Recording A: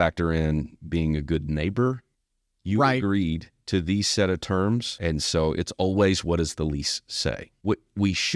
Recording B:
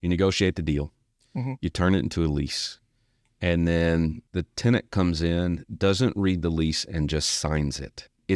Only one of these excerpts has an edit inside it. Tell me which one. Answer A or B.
A